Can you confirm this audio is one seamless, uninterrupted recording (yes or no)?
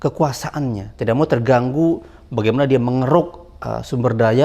yes